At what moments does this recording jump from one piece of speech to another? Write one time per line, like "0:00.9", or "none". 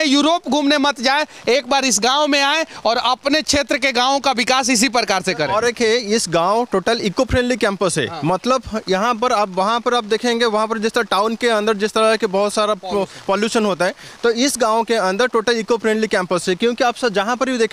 none